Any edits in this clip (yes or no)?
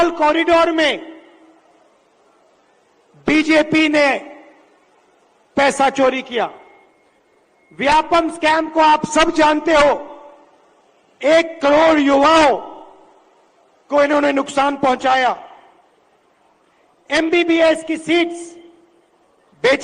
no